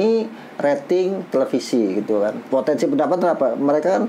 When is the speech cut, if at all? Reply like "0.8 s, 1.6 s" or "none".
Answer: none